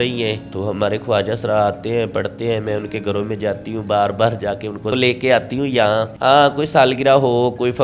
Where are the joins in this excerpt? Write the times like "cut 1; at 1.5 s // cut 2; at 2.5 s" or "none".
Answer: none